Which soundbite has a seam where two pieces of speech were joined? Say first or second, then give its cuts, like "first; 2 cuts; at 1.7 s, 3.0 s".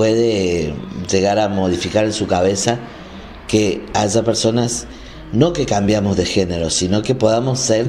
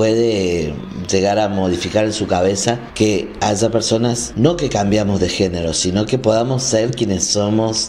second; 2 cuts; at 2.9 s, 4.3 s